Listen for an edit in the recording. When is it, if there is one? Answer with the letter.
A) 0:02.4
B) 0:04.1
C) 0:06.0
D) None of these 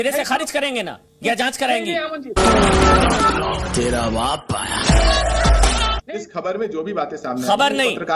C